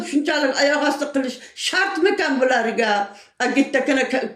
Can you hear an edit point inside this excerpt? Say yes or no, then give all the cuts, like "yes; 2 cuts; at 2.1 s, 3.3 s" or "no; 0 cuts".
no; 0 cuts